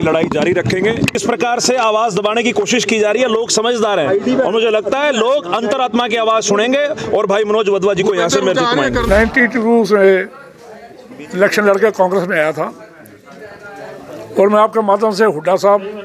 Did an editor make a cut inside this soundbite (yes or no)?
yes